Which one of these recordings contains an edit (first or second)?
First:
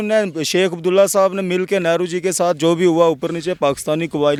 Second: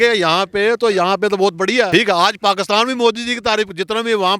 second